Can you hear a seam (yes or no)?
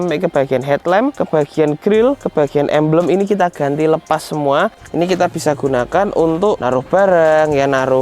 yes